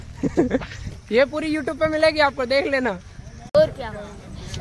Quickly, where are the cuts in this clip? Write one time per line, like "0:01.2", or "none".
0:03.5